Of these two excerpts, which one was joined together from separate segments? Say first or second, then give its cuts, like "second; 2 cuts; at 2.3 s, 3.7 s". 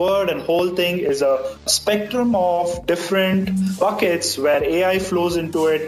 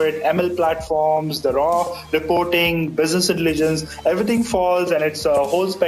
first; 2 cuts; at 1.7 s, 3.8 s